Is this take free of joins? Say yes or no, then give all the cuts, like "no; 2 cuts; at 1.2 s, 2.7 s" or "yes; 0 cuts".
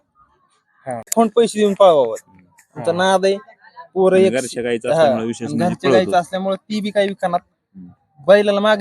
no; 1 cut; at 1.1 s